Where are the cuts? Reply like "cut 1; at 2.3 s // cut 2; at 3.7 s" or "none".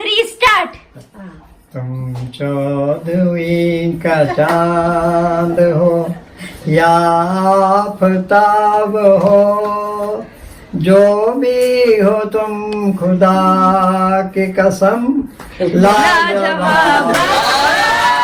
none